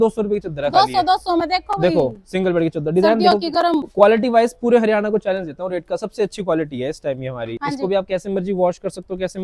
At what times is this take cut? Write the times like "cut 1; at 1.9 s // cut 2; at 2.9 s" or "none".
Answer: cut 1; at 3.9 s // cut 2; at 7.5 s